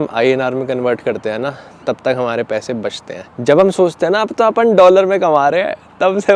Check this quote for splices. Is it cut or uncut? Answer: uncut